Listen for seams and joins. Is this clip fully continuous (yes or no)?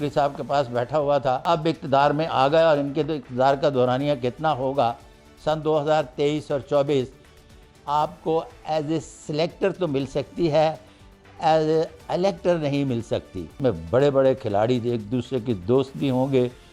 no